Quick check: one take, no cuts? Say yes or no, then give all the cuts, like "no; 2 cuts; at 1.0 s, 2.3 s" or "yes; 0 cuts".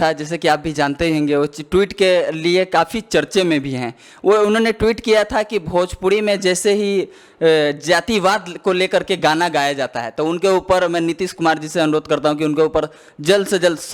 yes; 0 cuts